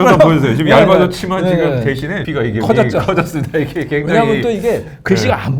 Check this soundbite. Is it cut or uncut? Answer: cut